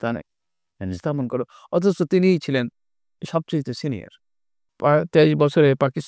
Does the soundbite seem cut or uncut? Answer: cut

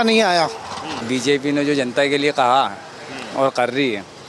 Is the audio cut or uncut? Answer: cut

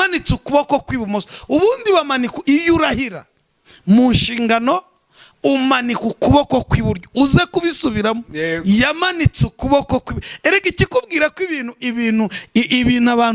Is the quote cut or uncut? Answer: uncut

